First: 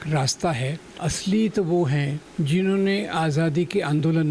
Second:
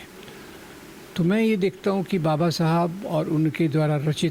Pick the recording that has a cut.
first; 2 cuts; at 1.0 s, 2.2 s

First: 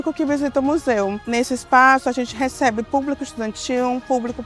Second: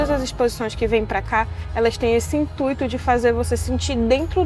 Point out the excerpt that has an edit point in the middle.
first; 1 cut; at 1.3 s

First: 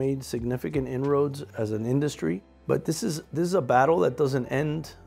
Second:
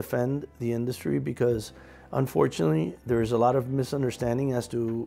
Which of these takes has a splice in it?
first; 2 cuts; at 1.4 s, 2.5 s

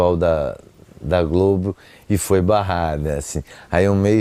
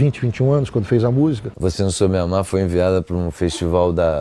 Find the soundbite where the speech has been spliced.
second; 1 cut; at 1.5 s

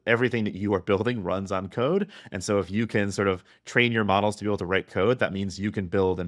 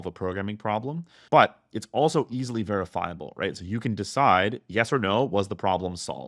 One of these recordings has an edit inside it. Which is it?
second; 1 cut; at 1.2 s

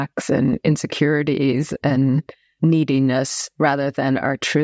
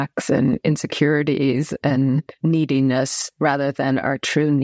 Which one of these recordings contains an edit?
second; 1 cut; at 2.3 s

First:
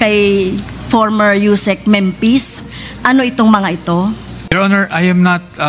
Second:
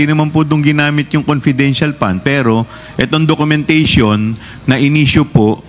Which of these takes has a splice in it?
first; 1 cut; at 4.5 s

